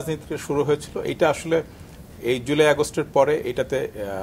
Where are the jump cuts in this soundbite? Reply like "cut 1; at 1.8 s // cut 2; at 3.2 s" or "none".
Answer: none